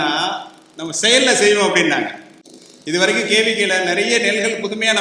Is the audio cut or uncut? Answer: uncut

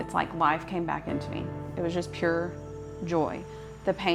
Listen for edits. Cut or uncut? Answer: uncut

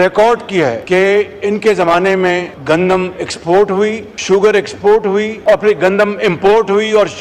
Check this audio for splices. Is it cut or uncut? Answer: cut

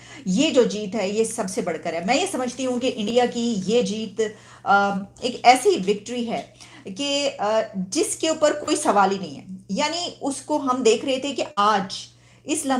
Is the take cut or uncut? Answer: uncut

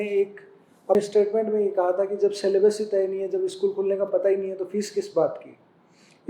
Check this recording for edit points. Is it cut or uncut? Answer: cut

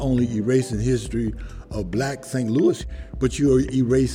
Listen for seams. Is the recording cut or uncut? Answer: cut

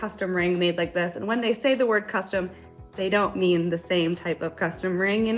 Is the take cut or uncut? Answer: uncut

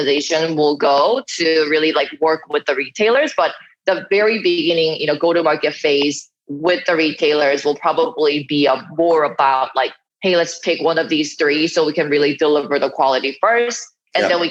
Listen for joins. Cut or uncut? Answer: uncut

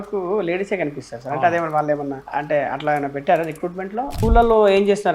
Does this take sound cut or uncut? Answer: cut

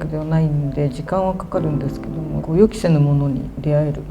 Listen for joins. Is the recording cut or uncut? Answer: cut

